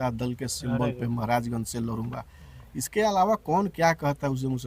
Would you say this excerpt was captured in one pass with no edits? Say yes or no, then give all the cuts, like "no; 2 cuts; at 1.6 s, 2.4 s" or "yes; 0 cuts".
yes; 0 cuts